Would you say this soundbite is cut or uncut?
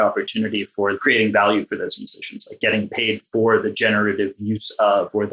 cut